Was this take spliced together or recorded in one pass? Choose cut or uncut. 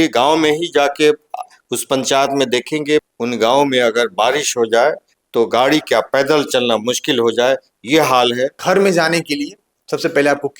cut